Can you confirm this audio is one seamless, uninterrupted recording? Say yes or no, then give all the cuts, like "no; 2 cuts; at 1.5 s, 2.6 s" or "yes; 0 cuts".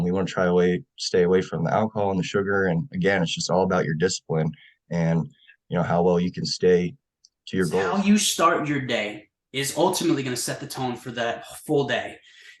no; 1 cut; at 7.8 s